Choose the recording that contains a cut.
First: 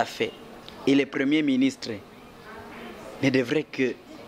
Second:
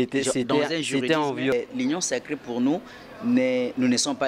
second; 1 cut; at 1.5 s

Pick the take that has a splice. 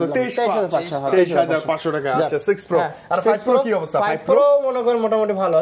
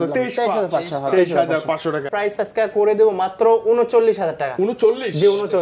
second; 1 cut; at 2.0 s

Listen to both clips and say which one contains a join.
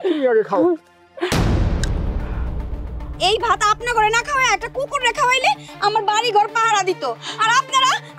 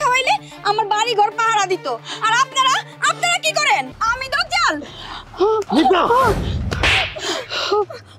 second; 1 cut; at 4.0 s

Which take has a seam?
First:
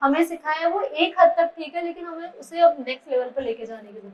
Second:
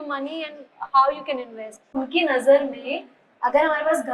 second; 1 cut; at 2.0 s

